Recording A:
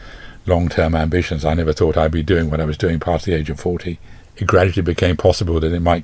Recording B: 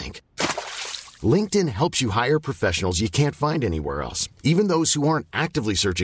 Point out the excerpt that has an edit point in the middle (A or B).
A